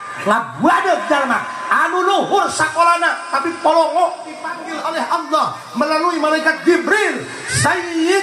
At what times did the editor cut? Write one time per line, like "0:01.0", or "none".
0:04.6